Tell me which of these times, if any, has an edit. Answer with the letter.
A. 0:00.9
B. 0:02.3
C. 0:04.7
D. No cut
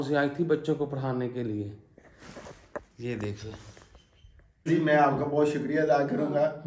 C